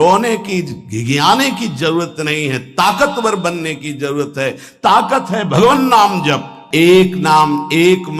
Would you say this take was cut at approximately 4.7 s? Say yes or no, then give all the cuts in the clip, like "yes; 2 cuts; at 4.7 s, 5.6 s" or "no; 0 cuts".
no; 1 cut; at 6.6 s